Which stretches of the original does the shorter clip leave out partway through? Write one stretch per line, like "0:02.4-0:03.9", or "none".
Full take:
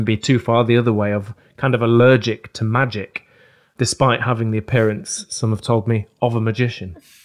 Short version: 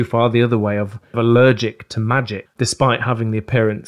0:01.5-0:01.8
0:03.1-0:03.6